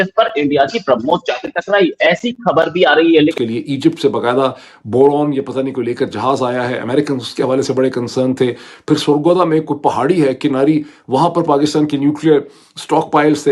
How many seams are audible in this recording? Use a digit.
1